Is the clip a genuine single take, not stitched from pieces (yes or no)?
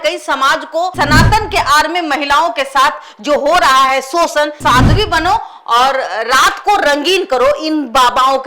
no